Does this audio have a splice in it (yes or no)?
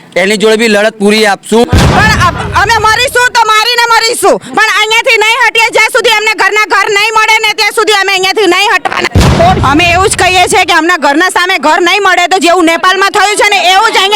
yes